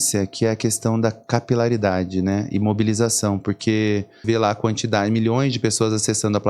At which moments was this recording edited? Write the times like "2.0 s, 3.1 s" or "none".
4.2 s